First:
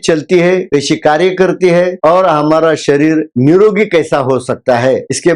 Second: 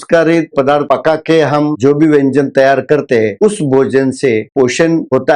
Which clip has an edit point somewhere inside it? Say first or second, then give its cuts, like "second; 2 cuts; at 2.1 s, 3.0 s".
second; 3 cuts; at 0.7 s, 1.7 s, 4.5 s